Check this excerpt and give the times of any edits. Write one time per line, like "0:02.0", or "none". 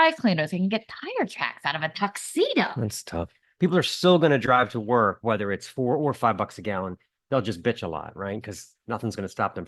0:03.4

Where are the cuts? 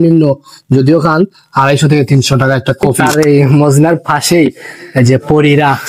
0:02.9

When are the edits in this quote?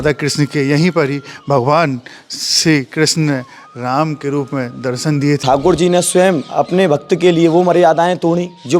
0:05.4

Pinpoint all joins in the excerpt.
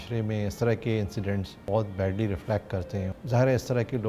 0:01.6
0:03.1

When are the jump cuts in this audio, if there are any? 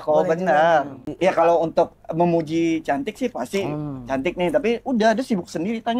0:01.0

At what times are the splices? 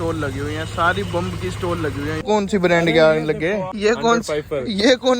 0:02.2
0:03.7

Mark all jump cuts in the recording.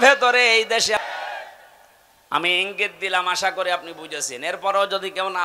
0:01.0

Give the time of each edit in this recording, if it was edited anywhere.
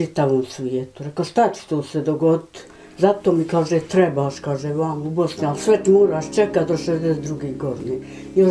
none

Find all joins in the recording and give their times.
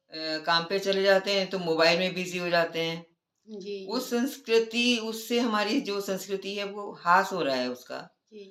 none

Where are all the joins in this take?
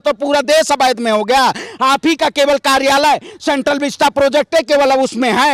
none

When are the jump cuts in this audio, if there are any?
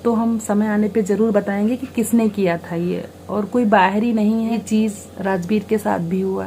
0:04.6

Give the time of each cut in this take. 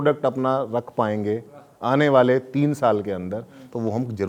none

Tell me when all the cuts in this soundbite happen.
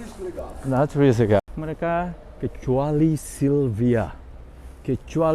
0:01.4

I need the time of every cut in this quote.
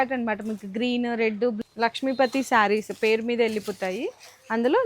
0:01.6

